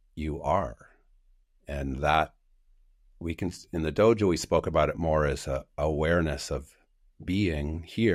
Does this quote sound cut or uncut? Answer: uncut